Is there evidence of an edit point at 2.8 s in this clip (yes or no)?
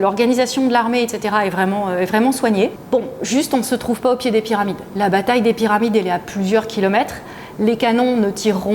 yes